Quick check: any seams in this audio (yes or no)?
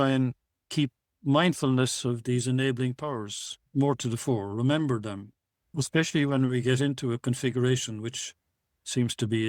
yes